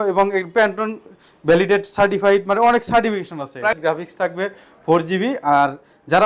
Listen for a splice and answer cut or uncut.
cut